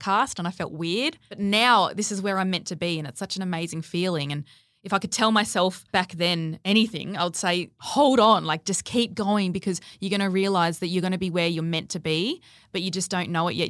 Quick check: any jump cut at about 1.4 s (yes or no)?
yes